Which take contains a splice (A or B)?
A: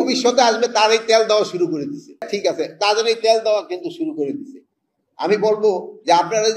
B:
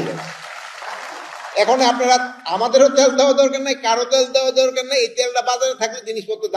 A